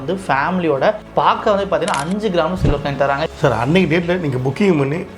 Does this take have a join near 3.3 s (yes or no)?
yes